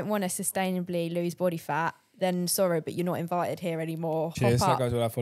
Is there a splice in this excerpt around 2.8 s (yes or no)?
no